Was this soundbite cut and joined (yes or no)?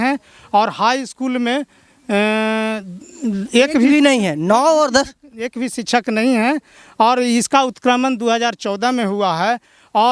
no